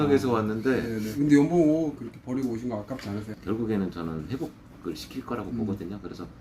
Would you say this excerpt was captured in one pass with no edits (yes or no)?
no